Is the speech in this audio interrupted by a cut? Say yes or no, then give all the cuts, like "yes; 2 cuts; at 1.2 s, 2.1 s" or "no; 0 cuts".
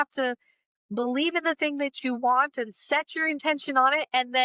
no; 0 cuts